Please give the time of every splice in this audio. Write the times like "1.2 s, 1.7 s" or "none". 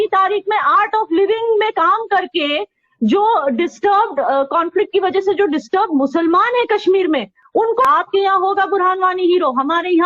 7.9 s